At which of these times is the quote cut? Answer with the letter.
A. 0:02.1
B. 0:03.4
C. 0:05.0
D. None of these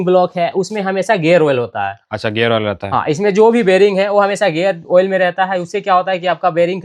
D